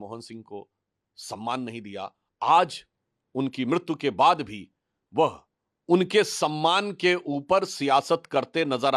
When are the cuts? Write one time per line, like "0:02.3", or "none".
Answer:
none